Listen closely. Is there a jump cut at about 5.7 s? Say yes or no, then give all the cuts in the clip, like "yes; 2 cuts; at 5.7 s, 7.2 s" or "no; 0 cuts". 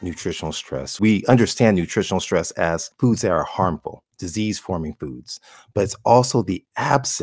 no; 2 cuts; at 1.0 s, 2.9 s